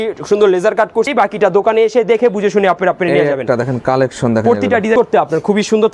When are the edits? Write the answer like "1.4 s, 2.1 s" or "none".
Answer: 1.1 s, 4.9 s